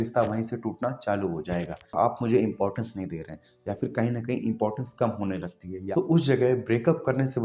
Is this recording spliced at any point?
yes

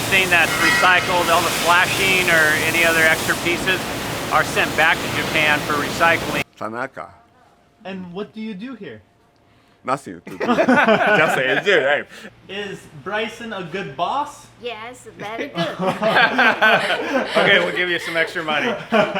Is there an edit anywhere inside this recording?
yes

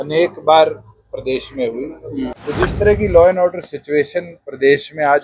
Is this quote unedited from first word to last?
no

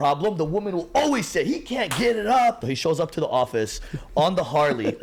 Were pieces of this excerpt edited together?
yes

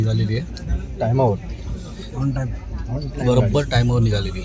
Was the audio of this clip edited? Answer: no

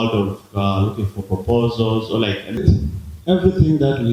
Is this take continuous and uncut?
no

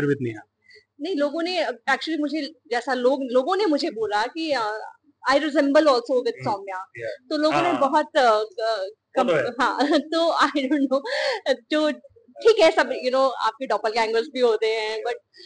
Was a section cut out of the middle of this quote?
no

